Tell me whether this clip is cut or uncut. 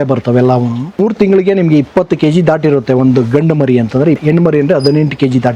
cut